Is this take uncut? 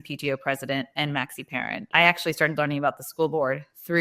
no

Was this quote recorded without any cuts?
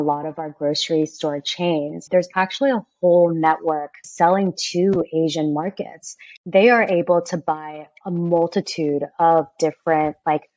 no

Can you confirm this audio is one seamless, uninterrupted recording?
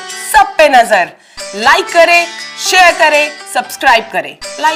yes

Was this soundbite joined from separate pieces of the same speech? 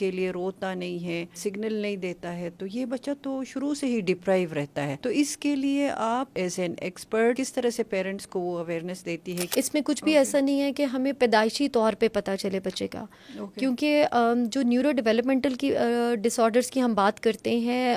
yes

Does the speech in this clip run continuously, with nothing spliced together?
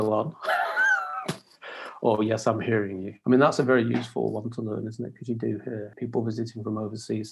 no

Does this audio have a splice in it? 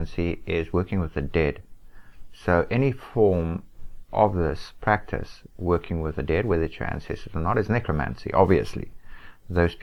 no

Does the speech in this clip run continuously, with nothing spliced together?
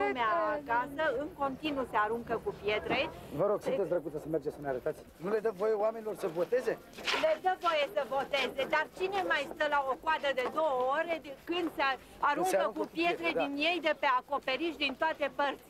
yes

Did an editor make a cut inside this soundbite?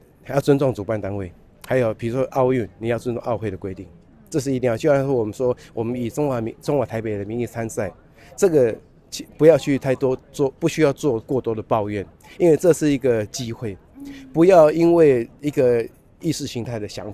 no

